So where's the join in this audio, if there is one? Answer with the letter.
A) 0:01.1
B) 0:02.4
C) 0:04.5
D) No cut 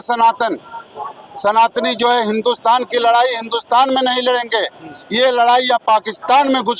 D